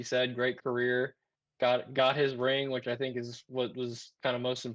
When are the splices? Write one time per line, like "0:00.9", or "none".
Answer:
none